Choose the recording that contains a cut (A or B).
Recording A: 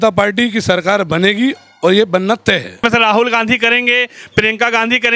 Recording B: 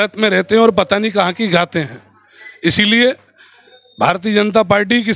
A